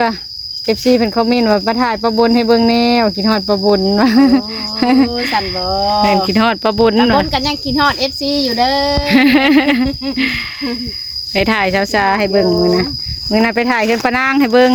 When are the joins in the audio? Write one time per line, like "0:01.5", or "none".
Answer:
none

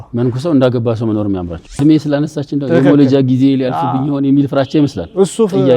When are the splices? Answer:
0:01.8

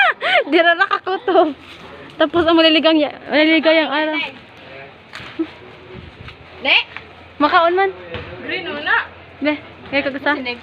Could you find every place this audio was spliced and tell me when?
none

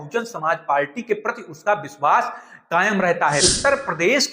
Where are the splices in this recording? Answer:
0:03.4

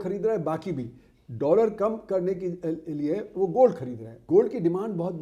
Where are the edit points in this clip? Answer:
0:04.1

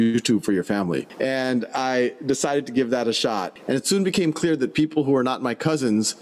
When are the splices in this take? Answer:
0:01.1
0:03.5

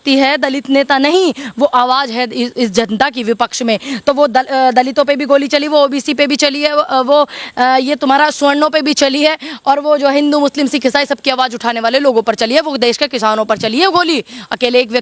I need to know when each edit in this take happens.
none

